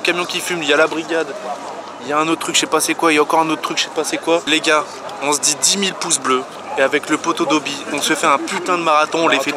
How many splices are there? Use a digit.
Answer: 1